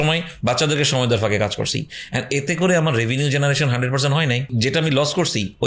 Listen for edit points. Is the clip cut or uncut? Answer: cut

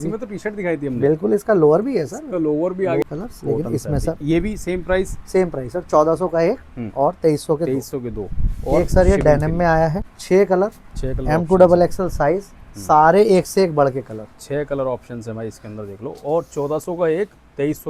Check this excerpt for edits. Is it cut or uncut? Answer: cut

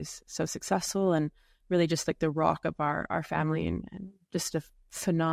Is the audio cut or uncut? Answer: uncut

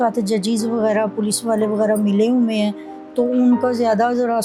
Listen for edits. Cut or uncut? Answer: uncut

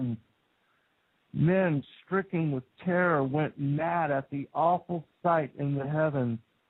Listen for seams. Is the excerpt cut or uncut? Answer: uncut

